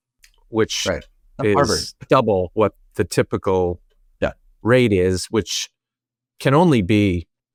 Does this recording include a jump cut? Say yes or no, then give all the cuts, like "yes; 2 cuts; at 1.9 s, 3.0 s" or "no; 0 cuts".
no; 0 cuts